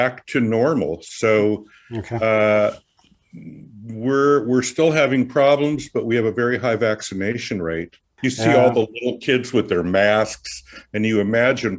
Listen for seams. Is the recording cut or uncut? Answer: cut